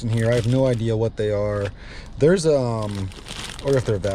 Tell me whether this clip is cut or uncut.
uncut